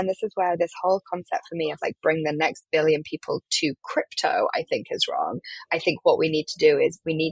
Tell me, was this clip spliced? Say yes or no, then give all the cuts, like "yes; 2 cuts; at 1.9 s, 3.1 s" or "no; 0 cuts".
no; 0 cuts